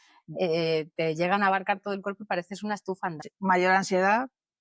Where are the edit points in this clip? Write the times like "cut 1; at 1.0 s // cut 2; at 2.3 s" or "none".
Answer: cut 1; at 3.2 s

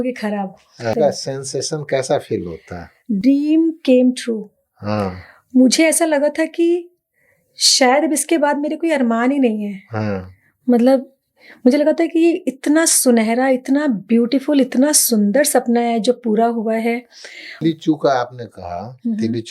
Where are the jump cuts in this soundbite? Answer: cut 1; at 1.0 s // cut 2; at 17.6 s

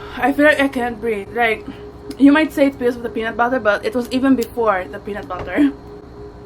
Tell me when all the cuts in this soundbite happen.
none

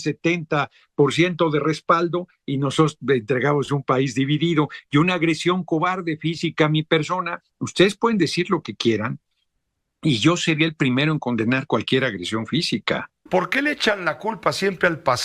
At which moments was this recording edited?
cut 1; at 13.2 s

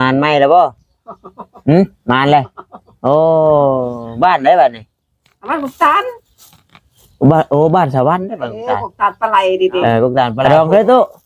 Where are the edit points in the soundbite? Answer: cut 1; at 10.4 s

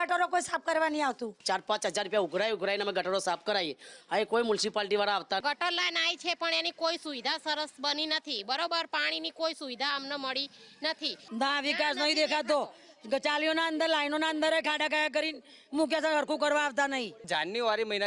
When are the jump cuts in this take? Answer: cut 1; at 1.3 s // cut 2; at 5.4 s // cut 3; at 11.2 s // cut 4; at 17.3 s

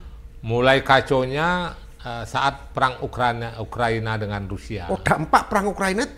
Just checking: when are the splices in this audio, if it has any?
none

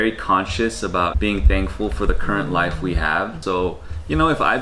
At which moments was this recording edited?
cut 1; at 1.1 s // cut 2; at 3.4 s

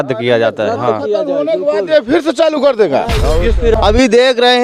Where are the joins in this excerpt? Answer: cut 1; at 3.7 s

